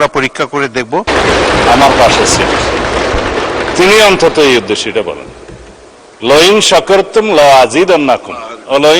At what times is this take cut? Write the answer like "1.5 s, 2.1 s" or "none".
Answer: 1.1 s